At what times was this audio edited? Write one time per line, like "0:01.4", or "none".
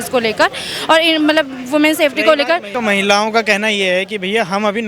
0:02.7